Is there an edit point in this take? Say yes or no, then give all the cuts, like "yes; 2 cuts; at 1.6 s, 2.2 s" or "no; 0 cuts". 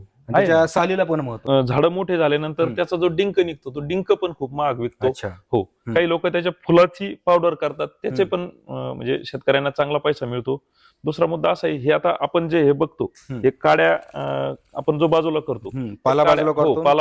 yes; 1 cut; at 1.4 s